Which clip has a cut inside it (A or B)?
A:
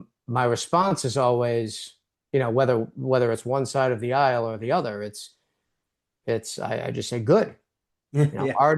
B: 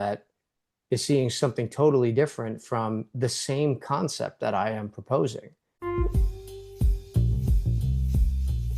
B